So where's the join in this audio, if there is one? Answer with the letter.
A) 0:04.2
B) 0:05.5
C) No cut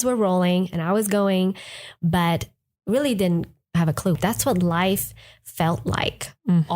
A